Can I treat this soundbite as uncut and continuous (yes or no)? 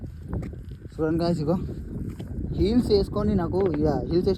yes